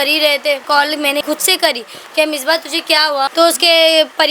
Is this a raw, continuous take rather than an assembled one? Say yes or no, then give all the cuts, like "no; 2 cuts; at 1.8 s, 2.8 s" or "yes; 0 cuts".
no; 2 cuts; at 1.1 s, 3.3 s